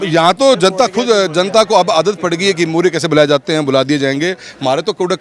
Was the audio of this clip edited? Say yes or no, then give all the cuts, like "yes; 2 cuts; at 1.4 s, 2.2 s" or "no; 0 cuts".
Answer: no; 0 cuts